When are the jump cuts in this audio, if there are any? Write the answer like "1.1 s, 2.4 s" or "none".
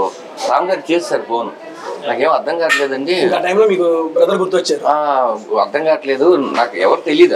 none